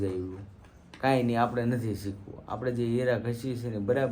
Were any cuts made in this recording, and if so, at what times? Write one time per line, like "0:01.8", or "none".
none